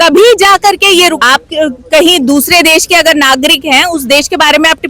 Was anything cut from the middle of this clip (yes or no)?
yes